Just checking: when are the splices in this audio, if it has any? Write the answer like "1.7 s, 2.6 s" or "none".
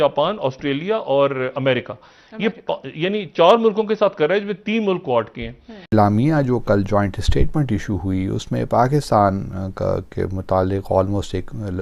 5.9 s